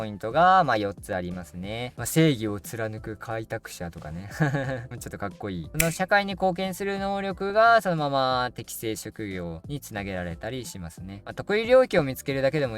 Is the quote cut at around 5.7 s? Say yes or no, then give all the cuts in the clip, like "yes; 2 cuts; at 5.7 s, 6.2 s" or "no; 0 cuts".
yes; 3 cuts; at 1.9 s, 5.7 s, 11.2 s